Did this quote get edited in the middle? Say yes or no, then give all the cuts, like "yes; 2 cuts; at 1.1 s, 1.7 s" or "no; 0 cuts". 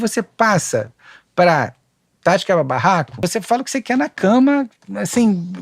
yes; 1 cut; at 3.2 s